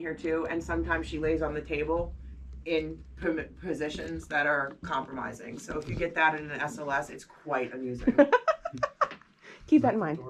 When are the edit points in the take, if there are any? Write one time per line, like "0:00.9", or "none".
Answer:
none